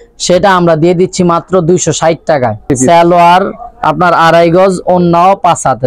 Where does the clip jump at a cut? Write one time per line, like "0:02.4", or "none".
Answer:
0:02.7